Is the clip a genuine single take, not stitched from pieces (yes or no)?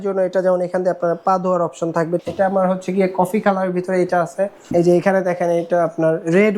no